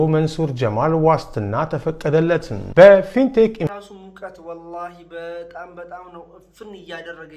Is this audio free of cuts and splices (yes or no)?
no